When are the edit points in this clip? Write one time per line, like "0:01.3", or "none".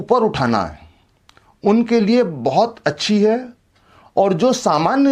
none